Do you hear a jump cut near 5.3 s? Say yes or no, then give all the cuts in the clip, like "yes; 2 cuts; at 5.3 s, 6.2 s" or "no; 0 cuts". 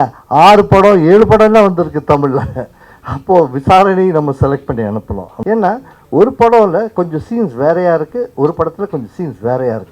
yes; 1 cut; at 5.3 s